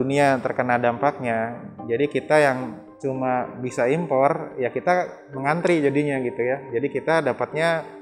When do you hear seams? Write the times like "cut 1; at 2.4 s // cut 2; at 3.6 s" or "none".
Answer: none